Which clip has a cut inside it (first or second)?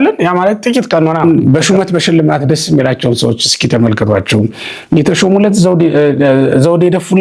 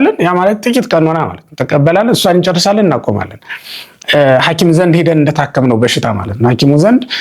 first